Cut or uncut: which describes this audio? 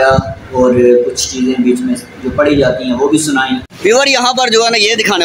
cut